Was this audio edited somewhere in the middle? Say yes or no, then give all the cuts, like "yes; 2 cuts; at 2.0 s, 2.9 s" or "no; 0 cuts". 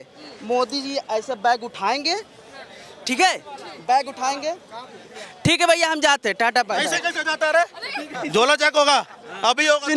no; 0 cuts